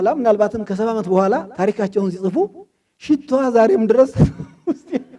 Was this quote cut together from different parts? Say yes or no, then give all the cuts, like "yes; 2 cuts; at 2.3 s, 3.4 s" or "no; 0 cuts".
no; 0 cuts